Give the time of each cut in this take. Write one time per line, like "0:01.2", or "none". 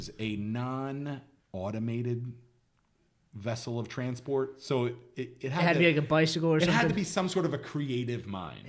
0:01.3